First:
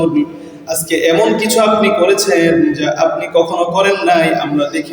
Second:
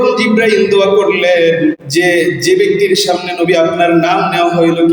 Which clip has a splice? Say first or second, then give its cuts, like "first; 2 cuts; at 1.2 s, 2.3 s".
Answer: second; 1 cut; at 1.8 s